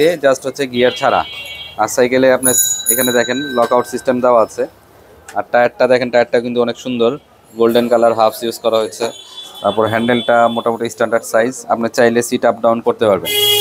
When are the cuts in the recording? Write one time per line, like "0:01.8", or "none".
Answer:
none